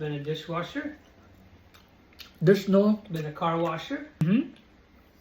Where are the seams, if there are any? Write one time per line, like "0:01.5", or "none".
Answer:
0:04.2